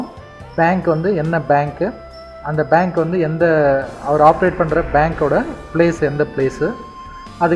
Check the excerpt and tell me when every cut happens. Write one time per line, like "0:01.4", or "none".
0:01.0